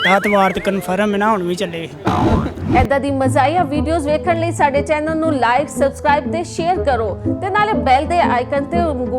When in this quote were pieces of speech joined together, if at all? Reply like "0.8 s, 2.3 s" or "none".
2.5 s